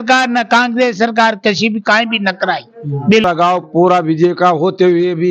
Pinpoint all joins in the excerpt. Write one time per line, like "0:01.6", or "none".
0:03.2